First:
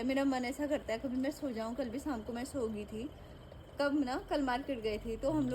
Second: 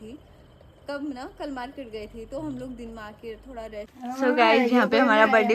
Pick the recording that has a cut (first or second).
second